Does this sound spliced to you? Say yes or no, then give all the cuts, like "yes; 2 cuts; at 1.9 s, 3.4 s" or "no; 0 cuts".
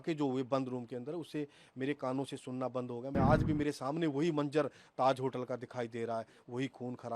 yes; 1 cut; at 3.1 s